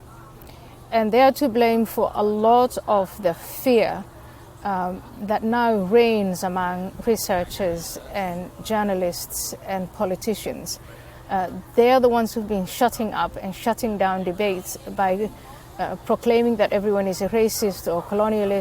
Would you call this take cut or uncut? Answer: uncut